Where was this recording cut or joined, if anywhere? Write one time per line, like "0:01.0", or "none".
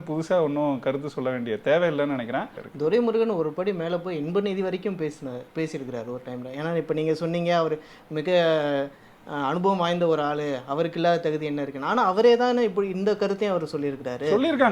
0:02.6